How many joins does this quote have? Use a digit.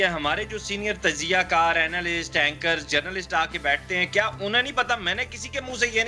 0